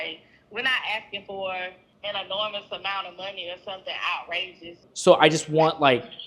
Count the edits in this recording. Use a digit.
2